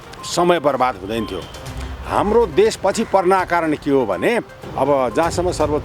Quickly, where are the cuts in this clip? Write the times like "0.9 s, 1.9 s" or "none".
4.6 s